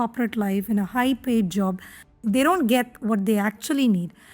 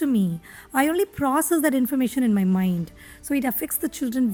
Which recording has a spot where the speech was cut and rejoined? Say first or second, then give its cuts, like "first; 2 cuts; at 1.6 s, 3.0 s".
first; 1 cut; at 2.1 s